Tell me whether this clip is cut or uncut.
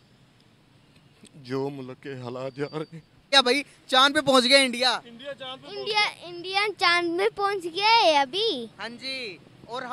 cut